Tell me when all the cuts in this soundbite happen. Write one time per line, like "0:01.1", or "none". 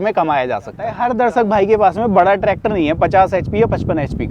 0:00.9